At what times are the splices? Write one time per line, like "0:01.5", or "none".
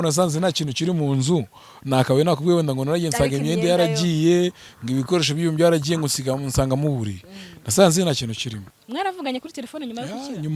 0:08.7

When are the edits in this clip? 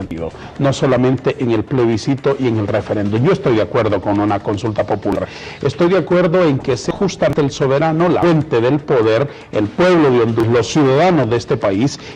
0:01.1

